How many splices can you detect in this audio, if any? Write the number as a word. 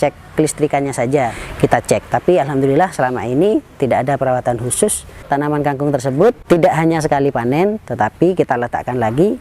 three